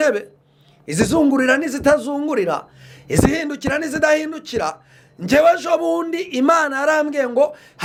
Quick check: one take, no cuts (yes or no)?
yes